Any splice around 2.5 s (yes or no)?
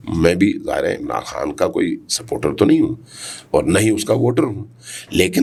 no